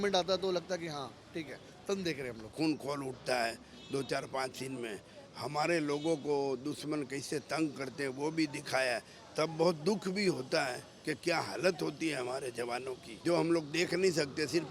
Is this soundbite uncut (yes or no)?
no